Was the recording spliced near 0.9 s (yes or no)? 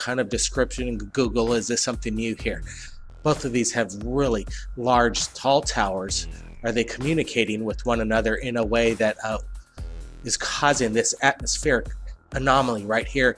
no